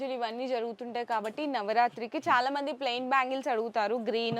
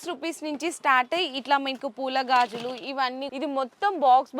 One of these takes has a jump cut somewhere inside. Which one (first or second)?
second